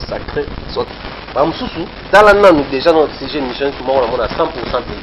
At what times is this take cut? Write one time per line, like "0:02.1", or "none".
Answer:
0:00.9